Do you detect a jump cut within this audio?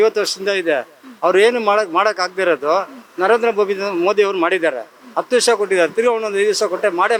no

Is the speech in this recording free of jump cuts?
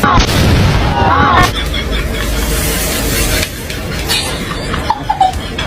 no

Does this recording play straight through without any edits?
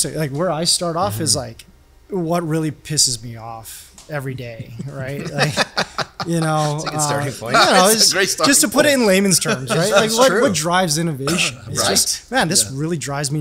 yes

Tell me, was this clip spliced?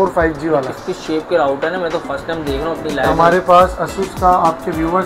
yes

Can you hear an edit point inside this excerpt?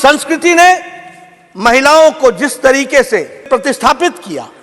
yes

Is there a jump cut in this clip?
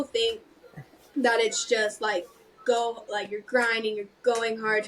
no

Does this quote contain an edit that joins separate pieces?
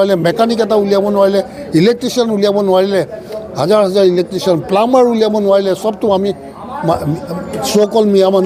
no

